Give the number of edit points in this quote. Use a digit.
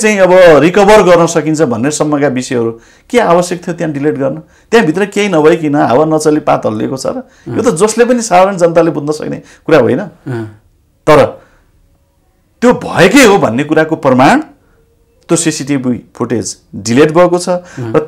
0